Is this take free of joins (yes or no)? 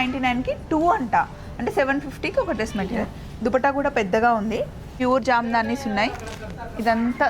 no